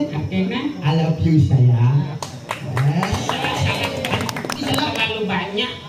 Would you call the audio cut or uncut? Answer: cut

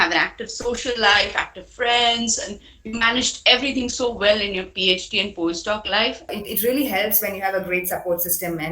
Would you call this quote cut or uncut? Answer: cut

